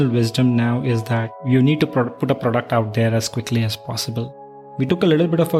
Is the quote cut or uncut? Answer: cut